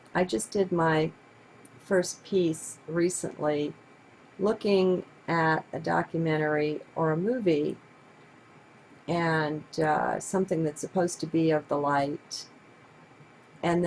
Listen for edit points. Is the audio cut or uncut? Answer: cut